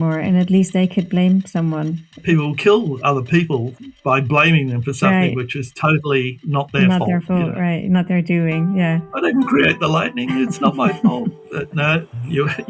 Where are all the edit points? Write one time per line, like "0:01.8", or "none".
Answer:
none